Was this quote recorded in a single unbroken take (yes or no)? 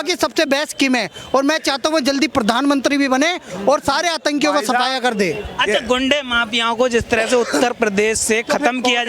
yes